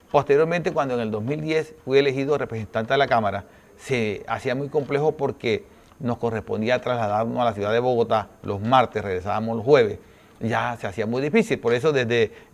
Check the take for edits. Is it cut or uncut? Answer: uncut